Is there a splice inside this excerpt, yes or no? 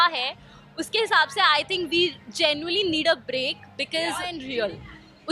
yes